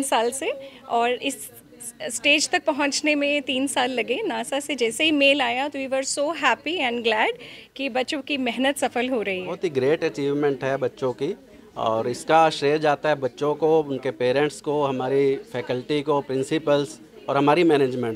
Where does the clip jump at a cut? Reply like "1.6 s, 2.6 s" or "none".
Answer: 9.5 s